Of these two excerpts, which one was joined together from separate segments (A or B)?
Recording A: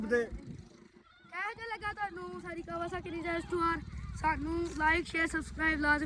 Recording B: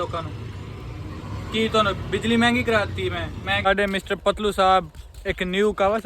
B